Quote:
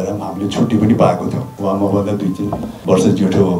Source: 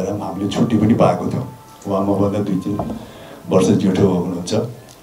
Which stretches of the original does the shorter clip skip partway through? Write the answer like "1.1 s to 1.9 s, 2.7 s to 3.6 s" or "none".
1.5 s to 1.7 s, 3.0 s to 3.3 s